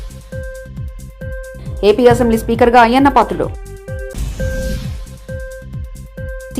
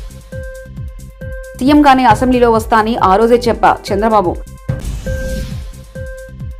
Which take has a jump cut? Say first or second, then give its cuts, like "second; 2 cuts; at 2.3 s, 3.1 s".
first; 1 cut; at 1.6 s